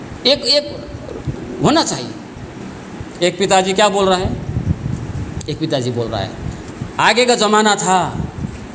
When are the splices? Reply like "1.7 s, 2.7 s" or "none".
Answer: 2.5 s